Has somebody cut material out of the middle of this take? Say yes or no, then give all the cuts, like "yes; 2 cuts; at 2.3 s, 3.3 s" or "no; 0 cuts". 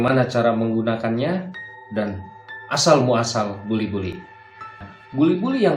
yes; 1 cut; at 4.8 s